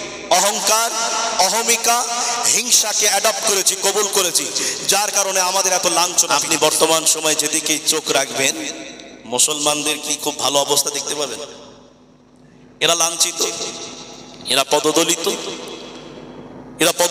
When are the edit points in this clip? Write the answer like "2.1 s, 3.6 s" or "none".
6.2 s